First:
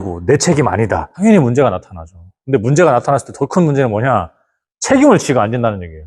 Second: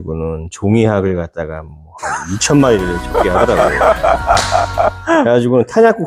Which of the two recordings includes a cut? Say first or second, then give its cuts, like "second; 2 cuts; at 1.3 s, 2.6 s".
first; 1 cut; at 1.1 s